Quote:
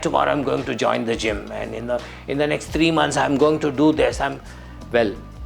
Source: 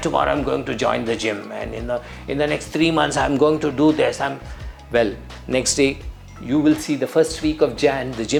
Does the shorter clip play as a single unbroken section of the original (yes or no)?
yes